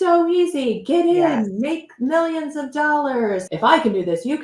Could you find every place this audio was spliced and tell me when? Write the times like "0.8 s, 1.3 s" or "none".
3.4 s